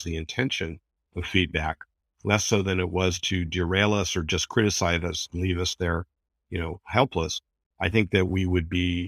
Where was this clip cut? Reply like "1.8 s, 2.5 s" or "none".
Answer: none